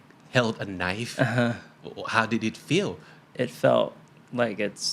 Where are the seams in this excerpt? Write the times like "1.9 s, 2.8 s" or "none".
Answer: 3.2 s